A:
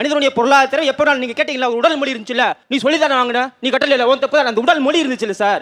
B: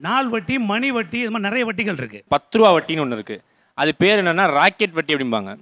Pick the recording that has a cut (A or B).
B